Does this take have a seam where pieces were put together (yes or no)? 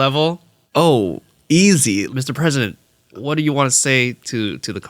yes